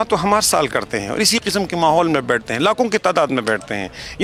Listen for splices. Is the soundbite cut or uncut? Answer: uncut